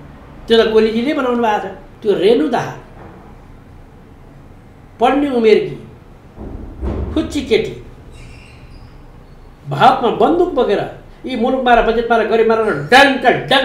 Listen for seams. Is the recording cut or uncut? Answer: cut